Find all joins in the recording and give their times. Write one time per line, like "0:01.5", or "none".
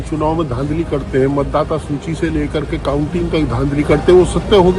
none